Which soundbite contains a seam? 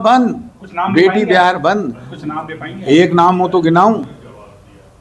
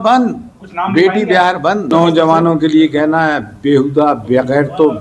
second; 1 cut; at 1.9 s

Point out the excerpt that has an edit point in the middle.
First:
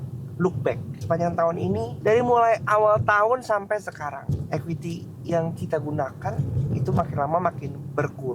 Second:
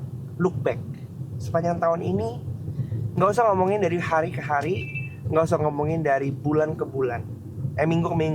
first; 3 cuts; at 0.9 s, 1.9 s, 4.2 s

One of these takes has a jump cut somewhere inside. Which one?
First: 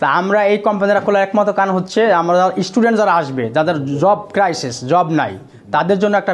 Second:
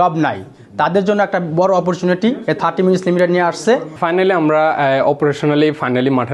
second; 1 cut; at 3.9 s

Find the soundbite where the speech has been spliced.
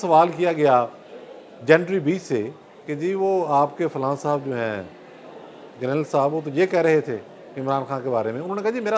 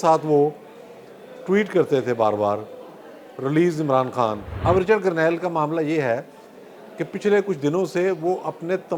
second; 1 cut; at 4.5 s

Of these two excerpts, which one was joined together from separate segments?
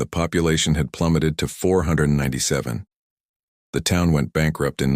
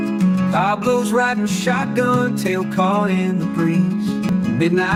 first; 1 cut; at 1.1 s

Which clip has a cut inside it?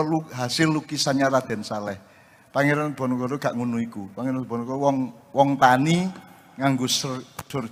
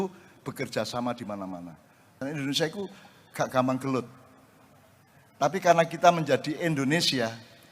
second; 1 cut; at 2.1 s

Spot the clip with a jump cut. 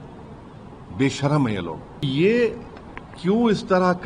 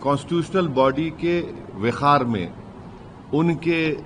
first; 1 cut; at 2.1 s

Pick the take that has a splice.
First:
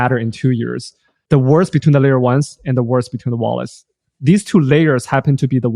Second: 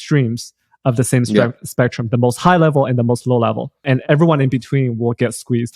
second; 1 cut; at 4.0 s

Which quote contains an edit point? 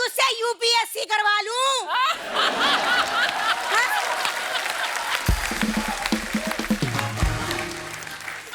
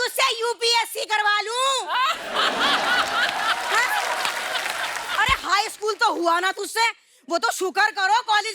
second; 1 cut; at 5.0 s

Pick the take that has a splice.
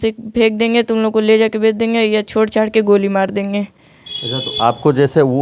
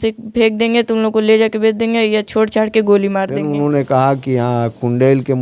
second; 1 cut; at 3.4 s

